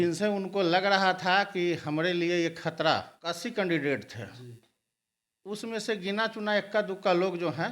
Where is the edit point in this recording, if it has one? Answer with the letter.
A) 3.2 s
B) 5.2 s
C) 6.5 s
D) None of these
A